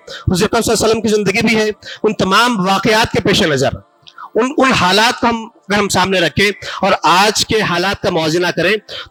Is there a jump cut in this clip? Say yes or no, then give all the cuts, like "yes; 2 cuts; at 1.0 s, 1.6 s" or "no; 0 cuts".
no; 0 cuts